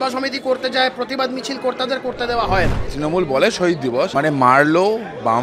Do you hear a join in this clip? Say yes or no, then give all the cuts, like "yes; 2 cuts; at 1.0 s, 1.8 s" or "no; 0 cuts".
yes; 2 cuts; at 2.9 s, 4.1 s